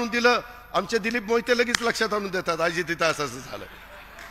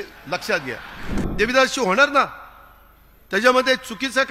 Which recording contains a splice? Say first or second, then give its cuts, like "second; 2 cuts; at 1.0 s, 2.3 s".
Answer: second; 1 cut; at 1.2 s